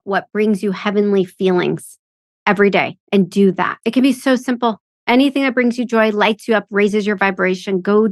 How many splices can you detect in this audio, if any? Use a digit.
1